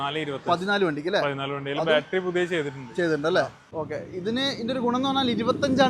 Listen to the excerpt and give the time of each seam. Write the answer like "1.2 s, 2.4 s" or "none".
3.7 s